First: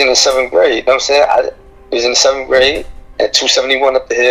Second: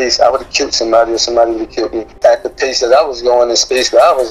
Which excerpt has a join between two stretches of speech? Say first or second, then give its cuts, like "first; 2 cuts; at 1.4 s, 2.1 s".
second; 1 cut; at 2.1 s